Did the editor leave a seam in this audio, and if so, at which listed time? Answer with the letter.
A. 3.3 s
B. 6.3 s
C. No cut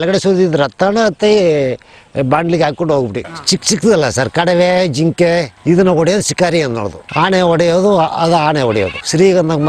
A